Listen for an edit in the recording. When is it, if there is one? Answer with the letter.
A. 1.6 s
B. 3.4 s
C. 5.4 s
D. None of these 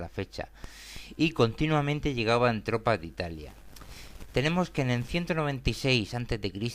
C